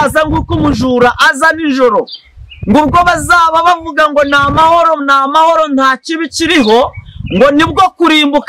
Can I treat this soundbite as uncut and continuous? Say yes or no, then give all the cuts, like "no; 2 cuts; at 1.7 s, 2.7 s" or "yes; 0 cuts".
yes; 0 cuts